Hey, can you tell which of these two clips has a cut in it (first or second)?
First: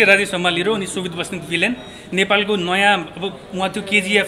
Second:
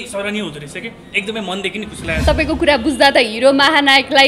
second